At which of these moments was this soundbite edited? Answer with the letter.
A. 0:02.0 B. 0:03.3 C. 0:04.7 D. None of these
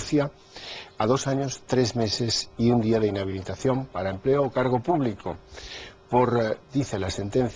D